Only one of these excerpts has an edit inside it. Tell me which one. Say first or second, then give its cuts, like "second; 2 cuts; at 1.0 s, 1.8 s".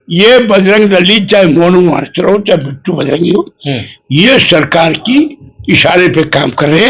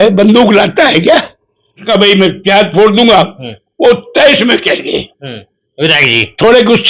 second; 1 cut; at 1.8 s